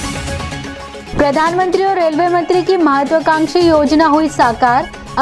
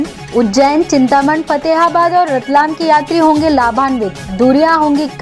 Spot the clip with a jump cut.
first; 1 cut; at 1.0 s

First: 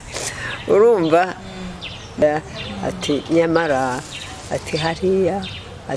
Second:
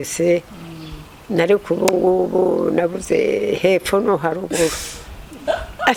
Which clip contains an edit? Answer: first; 1 cut; at 2.2 s

